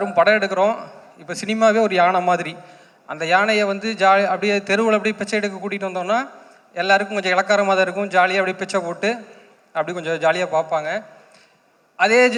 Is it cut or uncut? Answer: uncut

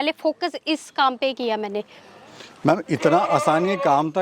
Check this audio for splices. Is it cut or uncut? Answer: uncut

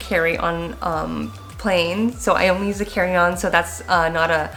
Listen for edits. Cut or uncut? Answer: uncut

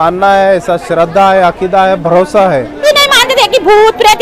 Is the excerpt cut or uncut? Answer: cut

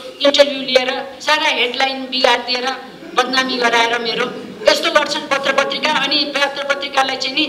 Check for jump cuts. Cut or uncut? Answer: uncut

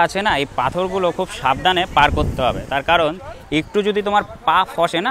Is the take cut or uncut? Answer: uncut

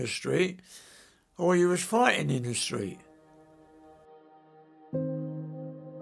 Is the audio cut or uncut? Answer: cut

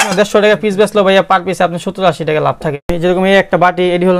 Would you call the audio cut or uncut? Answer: cut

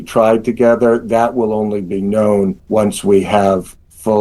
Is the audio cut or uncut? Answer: cut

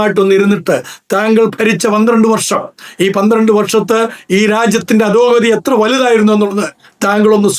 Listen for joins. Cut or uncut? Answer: uncut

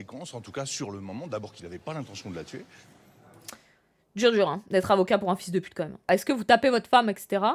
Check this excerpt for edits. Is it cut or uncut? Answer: cut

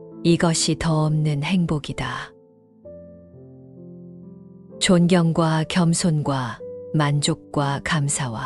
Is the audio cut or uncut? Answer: uncut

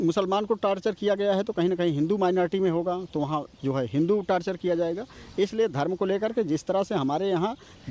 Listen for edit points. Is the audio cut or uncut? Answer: uncut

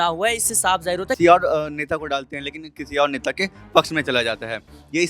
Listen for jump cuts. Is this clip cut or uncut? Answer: cut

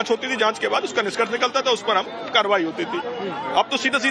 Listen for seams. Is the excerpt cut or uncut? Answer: uncut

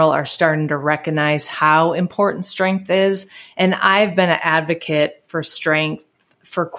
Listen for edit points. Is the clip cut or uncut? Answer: uncut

